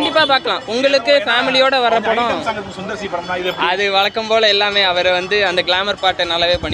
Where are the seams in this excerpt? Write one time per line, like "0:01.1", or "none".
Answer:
none